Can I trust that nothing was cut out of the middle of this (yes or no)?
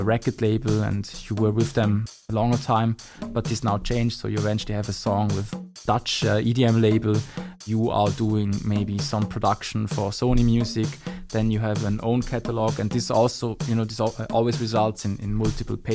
no